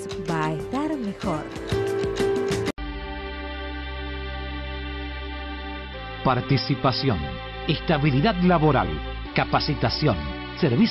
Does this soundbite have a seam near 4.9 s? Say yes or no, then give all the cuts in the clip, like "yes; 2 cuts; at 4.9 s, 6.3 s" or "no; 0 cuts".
no; 1 cut; at 2.8 s